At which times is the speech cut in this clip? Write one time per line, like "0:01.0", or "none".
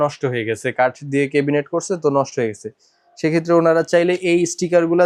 none